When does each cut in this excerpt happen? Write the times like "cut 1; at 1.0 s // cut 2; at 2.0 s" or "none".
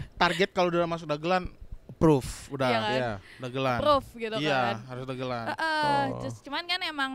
none